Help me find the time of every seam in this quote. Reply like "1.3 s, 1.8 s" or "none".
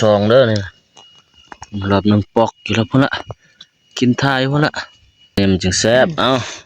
5.4 s